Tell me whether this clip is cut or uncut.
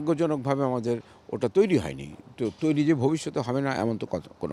uncut